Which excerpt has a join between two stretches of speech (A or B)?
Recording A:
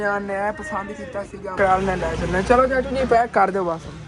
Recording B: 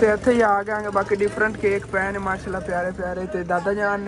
A